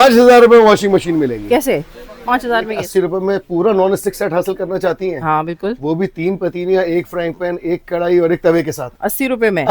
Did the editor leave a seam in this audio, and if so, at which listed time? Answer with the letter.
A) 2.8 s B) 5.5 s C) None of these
A